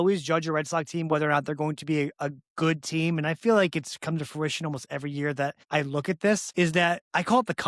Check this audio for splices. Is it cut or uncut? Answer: cut